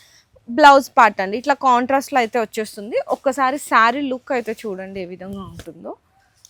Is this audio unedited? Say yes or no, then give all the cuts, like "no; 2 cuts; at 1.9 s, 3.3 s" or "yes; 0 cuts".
yes; 0 cuts